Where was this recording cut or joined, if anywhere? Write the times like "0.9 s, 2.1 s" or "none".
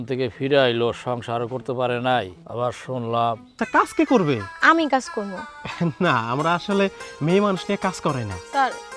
3.6 s